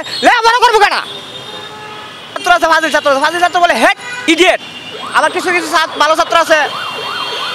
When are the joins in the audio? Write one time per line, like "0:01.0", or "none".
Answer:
0:02.4
0:04.1